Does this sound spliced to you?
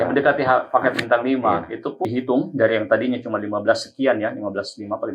yes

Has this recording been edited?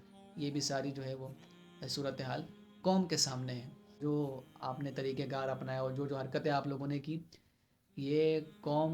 yes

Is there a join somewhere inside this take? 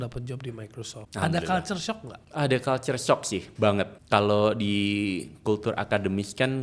yes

